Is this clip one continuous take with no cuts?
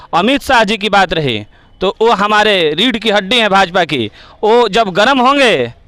yes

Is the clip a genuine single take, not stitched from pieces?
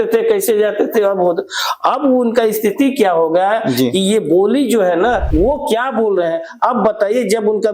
no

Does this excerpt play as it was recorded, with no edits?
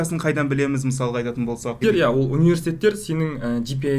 no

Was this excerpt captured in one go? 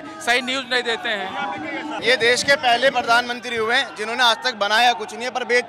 no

